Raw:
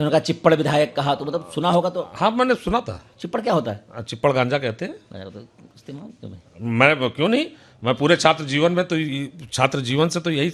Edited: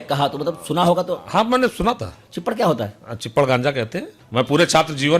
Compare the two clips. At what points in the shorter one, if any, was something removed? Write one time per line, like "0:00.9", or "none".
0:04.1